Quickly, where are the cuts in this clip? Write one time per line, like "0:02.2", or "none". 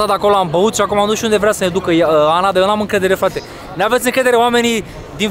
none